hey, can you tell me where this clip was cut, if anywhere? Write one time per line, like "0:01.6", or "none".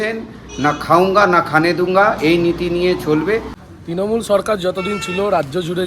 0:03.7